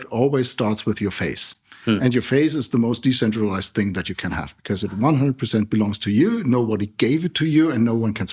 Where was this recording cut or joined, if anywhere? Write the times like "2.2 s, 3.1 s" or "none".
none